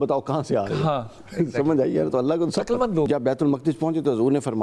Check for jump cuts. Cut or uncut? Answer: cut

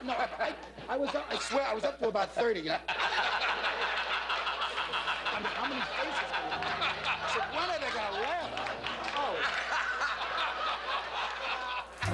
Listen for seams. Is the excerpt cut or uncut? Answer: uncut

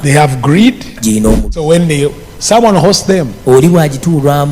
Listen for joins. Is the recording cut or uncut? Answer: cut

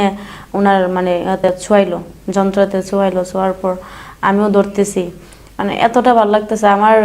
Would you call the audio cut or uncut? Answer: cut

